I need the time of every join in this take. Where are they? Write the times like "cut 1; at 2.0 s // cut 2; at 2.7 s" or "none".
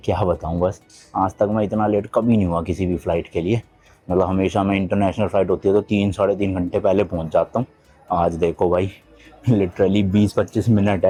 none